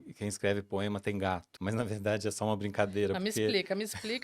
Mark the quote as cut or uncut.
cut